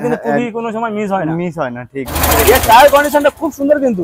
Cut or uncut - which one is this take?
cut